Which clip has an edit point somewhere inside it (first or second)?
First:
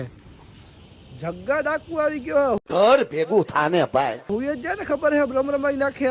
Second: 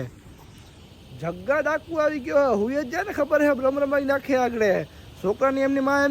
second